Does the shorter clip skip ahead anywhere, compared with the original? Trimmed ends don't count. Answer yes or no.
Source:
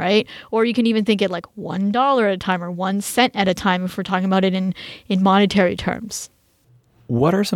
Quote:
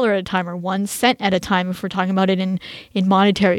no